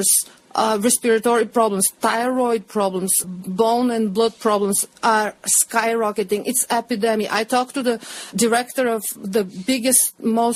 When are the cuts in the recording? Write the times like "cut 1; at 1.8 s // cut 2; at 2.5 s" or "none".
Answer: none